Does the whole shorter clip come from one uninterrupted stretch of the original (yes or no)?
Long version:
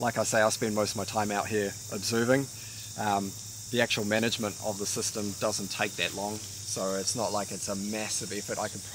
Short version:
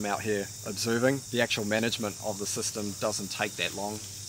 no